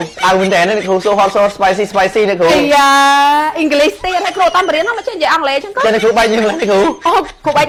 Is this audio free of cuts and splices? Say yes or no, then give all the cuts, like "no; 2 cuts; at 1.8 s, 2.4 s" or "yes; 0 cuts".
yes; 0 cuts